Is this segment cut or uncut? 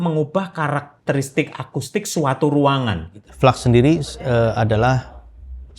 cut